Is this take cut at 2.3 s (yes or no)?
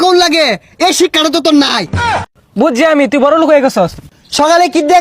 yes